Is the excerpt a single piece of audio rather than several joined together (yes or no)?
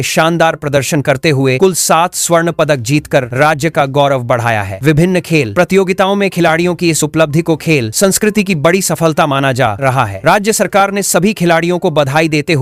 yes